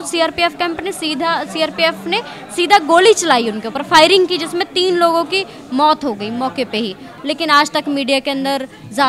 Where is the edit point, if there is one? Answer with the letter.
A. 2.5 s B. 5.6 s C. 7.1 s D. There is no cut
C